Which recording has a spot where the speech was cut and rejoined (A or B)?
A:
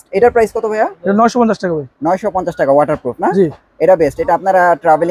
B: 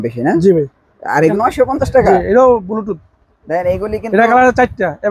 B